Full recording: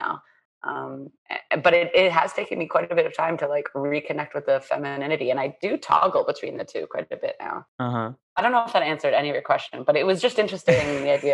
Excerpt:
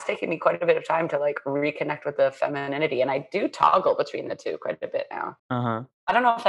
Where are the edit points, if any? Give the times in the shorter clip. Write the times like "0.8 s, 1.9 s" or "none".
none

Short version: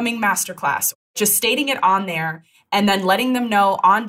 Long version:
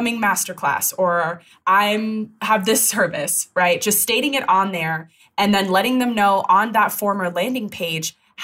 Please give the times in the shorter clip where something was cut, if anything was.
1.0 s

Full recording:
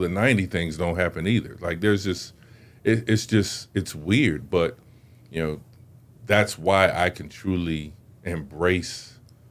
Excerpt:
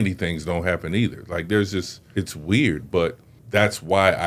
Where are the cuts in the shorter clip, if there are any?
2.0 s, 3.3 s

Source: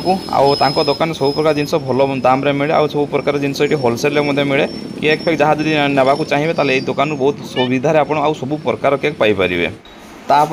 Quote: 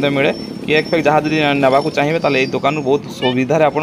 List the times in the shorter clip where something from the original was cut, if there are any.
none

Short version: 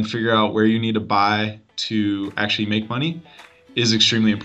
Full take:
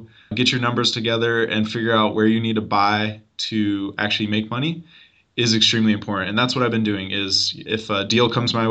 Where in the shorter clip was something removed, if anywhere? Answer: none

